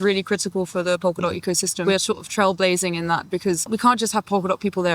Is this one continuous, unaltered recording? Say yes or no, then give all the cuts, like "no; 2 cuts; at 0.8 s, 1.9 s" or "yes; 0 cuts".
no; 2 cuts; at 1.8 s, 3.6 s